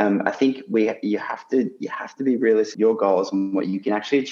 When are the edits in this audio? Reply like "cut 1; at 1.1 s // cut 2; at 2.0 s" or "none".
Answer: cut 1; at 2.7 s